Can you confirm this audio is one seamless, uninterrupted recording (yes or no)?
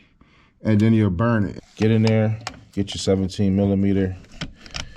no